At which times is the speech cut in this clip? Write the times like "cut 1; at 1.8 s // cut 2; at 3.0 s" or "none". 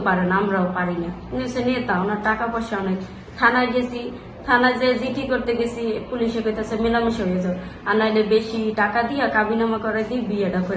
none